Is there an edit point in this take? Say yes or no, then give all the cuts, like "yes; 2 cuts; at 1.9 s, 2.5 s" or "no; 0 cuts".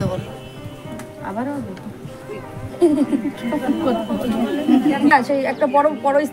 yes; 1 cut; at 5.1 s